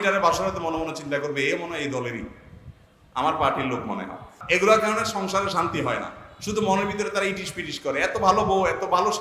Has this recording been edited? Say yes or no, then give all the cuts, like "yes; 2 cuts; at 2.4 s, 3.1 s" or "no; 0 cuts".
yes; 1 cut; at 4.3 s